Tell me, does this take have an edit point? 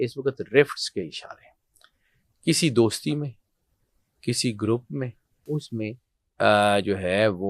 yes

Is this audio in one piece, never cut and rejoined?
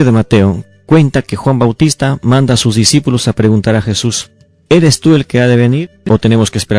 no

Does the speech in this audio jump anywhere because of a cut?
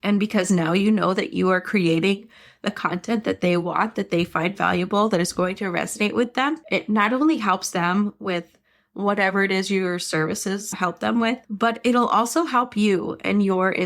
yes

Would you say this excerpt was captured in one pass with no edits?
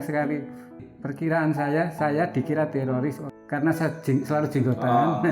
no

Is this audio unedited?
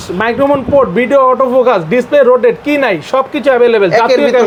yes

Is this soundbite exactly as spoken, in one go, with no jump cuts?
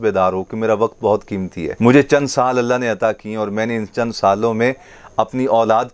no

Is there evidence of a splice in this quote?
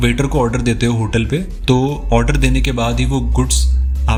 no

